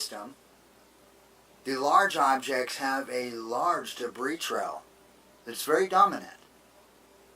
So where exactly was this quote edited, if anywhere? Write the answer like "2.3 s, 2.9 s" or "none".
2.7 s